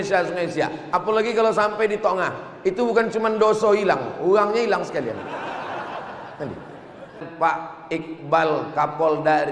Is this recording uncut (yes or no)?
no